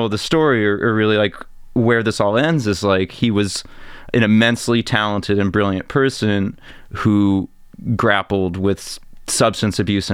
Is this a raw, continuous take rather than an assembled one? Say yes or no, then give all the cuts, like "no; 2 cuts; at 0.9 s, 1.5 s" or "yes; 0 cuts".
yes; 0 cuts